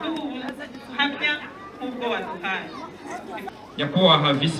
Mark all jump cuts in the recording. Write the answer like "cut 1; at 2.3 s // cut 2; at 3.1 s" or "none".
cut 1; at 3.3 s